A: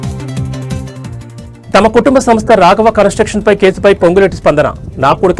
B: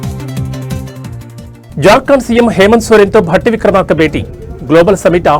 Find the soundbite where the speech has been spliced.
B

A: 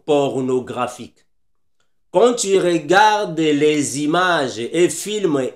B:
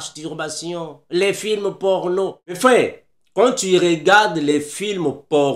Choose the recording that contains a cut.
B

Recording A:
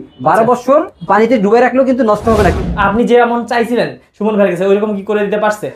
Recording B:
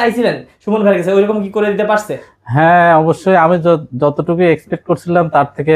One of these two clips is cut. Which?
A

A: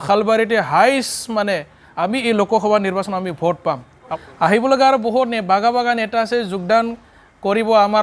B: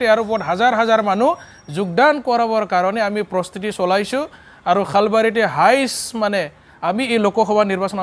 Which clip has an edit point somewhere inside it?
A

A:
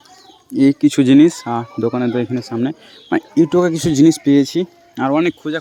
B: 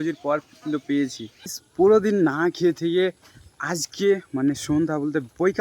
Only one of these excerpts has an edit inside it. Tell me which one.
B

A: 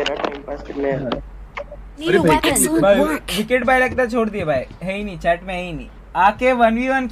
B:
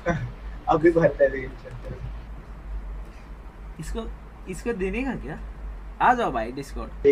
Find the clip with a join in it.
A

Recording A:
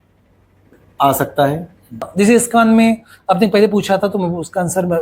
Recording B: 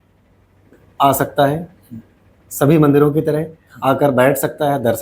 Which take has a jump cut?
A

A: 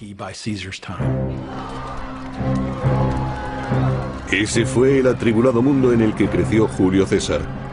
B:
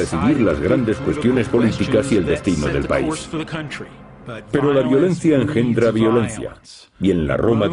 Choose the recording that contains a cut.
B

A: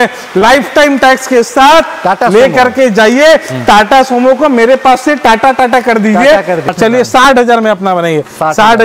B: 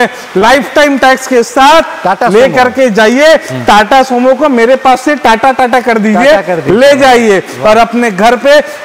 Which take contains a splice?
A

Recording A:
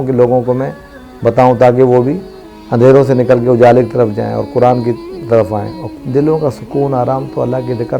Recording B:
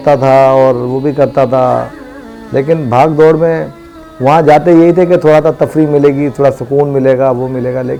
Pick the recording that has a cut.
A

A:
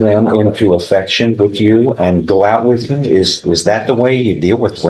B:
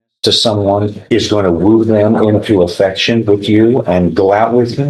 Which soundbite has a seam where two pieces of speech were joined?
B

